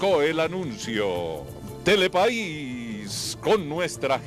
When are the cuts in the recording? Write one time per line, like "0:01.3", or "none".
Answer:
0:02.0